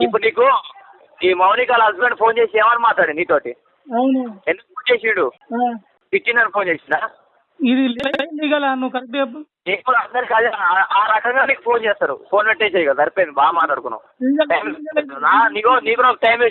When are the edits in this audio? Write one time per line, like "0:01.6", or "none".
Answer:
0:05.4